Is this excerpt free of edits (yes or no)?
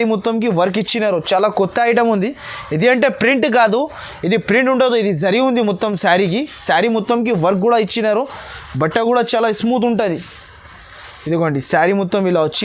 yes